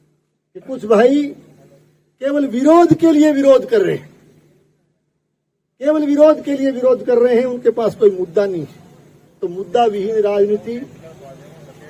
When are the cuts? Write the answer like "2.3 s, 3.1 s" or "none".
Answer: none

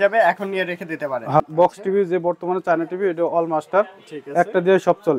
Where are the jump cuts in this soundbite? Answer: 1.4 s

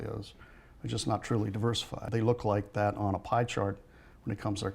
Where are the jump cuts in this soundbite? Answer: 2.1 s

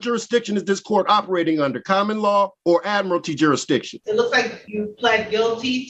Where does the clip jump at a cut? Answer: 2.6 s, 4.0 s, 4.6 s

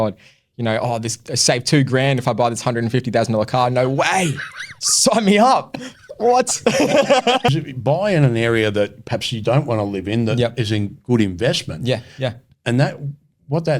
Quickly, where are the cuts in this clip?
7.5 s

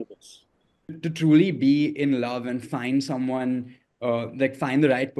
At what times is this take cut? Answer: 1.0 s

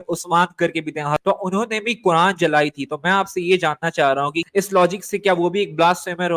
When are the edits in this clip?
1.2 s, 4.4 s

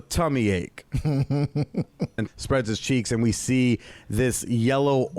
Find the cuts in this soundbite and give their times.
2.2 s

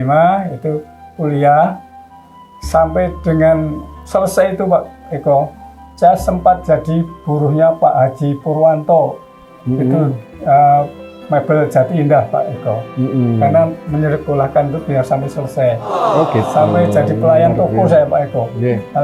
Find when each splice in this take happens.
none

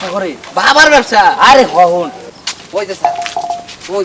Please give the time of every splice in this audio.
2.3 s

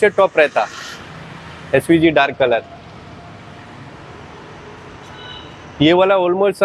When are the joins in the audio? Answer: none

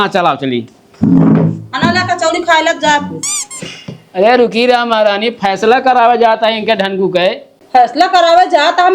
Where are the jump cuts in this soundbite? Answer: 7.5 s

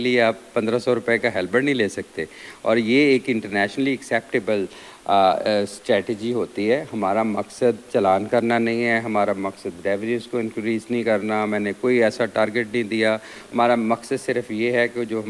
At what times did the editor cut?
none

